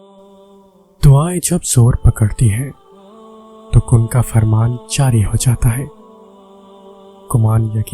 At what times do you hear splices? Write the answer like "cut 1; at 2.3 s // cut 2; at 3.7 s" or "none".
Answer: cut 1; at 1.0 s